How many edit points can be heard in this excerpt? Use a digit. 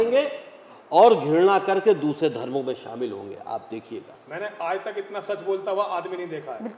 1